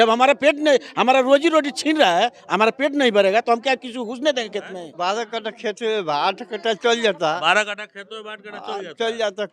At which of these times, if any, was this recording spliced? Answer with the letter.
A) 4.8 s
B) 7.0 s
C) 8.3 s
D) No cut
A